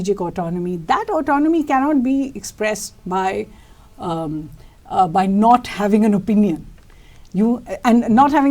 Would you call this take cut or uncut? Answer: uncut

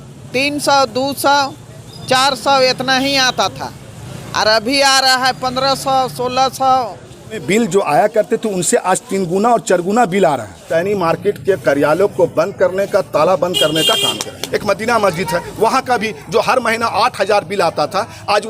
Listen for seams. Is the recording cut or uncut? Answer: cut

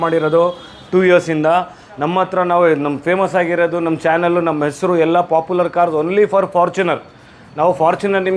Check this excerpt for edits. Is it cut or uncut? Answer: uncut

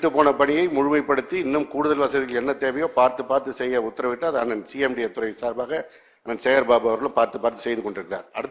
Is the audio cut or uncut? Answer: uncut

